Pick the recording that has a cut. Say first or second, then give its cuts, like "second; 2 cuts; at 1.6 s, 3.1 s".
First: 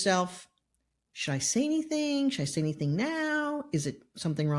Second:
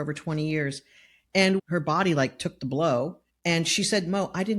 second; 2 cuts; at 1.2 s, 3.3 s